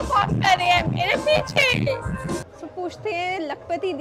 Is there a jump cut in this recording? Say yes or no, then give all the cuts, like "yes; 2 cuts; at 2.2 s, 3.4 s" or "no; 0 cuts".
yes; 1 cut; at 2.4 s